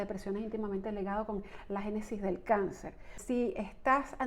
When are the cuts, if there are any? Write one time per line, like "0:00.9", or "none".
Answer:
0:03.2